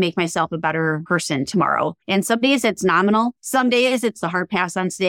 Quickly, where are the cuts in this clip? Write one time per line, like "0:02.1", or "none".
0:01.0
0:02.0
0:03.4
0:04.2